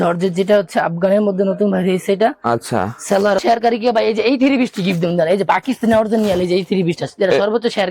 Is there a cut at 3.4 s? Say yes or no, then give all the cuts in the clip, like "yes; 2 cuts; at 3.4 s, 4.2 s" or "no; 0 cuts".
yes; 1 cut; at 3.4 s